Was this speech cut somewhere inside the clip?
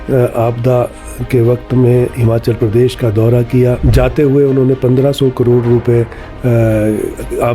yes; 1 cut; at 3.8 s

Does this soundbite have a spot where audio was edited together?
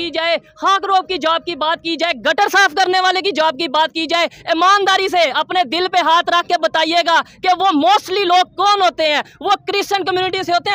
no; 0 cuts

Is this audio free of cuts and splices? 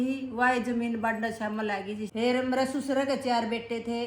no; 1 cut; at 2.1 s

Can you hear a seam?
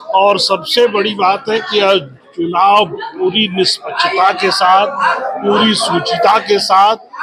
no; 0 cuts

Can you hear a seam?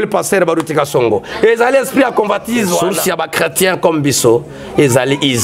yes; 1 cut; at 2.9 s

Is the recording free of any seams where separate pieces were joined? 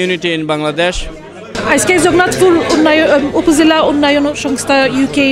no; 1 cut; at 1.5 s

